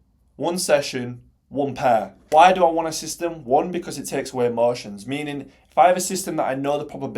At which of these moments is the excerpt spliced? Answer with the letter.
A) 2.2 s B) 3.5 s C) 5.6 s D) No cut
A